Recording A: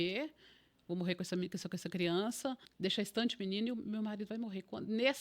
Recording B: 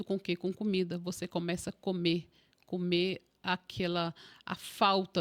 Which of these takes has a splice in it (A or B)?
A